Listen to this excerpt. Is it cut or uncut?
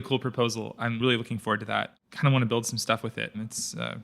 cut